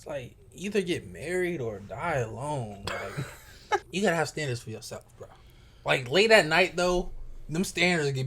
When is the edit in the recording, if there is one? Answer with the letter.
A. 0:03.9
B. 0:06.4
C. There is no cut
A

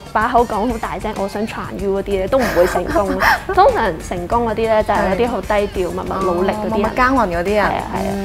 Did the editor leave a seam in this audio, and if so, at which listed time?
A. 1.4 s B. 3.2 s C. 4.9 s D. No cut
D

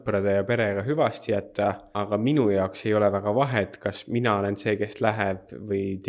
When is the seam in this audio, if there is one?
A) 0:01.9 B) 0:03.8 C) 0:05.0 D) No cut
A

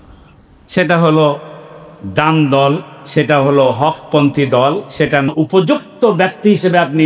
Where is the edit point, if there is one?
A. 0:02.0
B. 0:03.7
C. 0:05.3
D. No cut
C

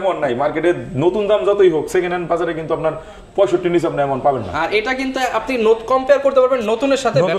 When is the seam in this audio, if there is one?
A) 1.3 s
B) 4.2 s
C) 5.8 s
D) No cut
D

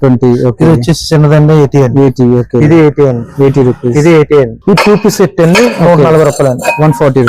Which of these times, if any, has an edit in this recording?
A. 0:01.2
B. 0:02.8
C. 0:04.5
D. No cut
C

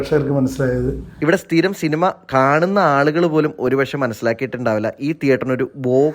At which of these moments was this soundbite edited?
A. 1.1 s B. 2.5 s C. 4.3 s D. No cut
A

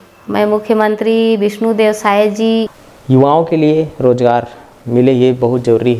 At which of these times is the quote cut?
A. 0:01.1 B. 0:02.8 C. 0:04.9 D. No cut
B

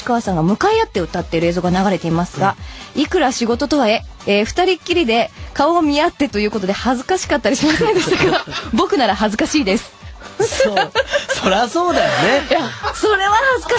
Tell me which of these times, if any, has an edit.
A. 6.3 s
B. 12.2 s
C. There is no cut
C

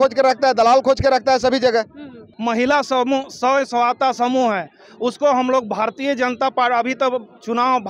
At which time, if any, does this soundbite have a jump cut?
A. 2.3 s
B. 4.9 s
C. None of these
A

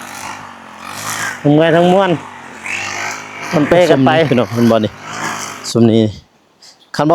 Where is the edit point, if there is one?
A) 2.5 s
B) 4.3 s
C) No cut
B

